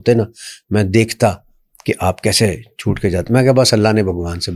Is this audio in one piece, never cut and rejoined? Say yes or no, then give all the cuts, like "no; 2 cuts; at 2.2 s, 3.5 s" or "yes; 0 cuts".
yes; 0 cuts